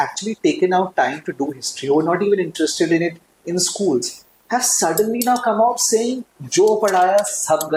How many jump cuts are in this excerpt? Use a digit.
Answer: 0